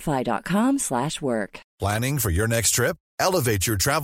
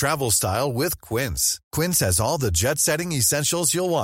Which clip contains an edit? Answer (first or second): first